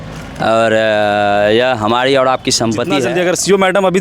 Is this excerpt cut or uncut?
cut